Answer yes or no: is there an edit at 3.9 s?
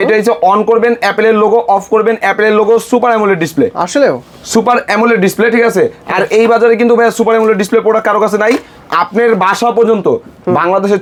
no